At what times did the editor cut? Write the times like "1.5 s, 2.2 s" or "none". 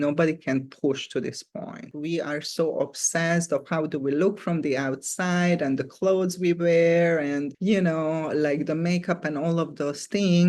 1.9 s

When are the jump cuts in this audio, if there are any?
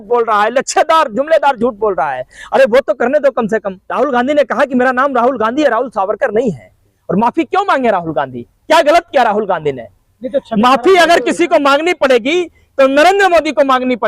3.8 s

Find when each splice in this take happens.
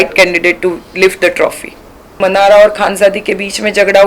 2.2 s

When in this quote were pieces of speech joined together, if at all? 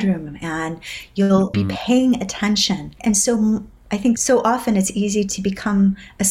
1.5 s, 2.9 s, 4.2 s

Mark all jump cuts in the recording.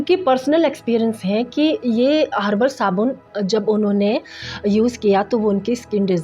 none

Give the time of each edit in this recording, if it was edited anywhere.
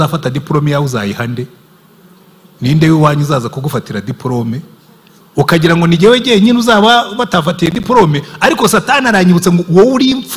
none

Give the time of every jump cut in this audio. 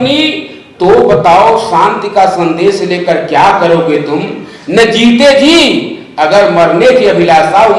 none

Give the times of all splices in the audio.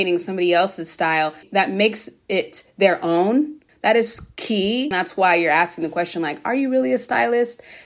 1.4 s, 3.6 s, 4.9 s

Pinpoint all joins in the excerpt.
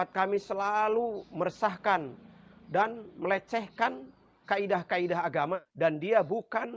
5.6 s

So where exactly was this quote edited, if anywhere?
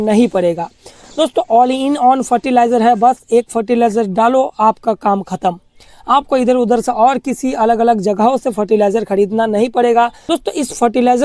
10.2 s

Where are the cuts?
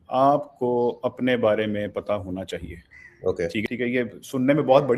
3.7 s

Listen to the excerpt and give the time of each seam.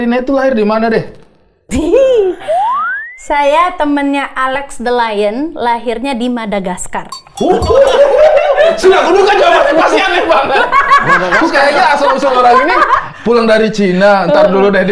none

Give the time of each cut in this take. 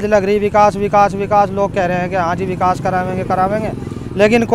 none

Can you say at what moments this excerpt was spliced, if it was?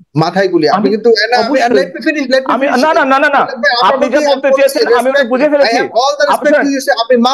none

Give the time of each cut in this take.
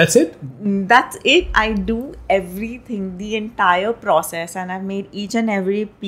none

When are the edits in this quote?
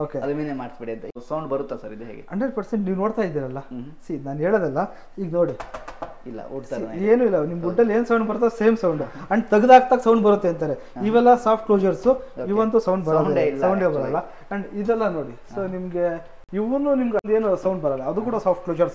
1.1 s, 17.3 s

